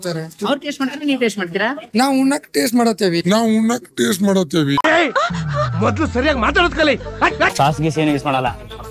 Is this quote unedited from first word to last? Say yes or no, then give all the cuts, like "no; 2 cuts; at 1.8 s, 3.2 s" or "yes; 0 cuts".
no; 1 cut; at 7.5 s